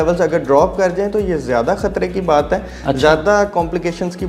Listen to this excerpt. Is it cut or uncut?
uncut